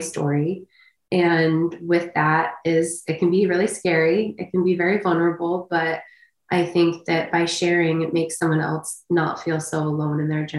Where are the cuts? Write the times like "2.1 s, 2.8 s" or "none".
none